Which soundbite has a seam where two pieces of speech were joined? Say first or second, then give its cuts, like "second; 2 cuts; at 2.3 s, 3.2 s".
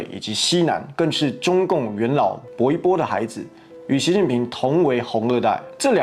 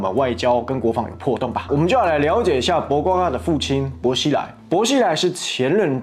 second; 1 cut; at 1.7 s